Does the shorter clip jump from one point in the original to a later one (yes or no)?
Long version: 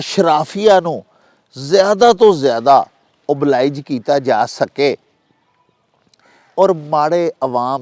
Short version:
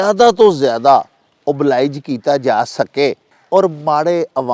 yes